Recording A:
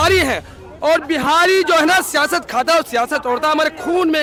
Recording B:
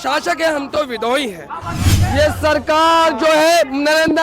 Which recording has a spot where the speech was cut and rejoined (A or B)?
B